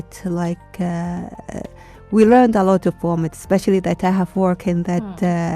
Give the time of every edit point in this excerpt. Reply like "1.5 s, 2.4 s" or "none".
none